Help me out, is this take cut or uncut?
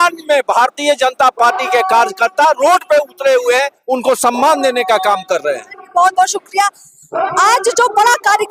uncut